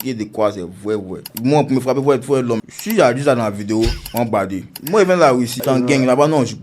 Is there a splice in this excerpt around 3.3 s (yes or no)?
no